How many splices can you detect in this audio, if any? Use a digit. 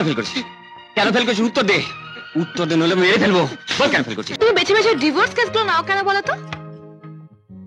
1